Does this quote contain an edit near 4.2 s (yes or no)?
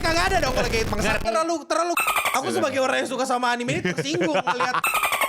no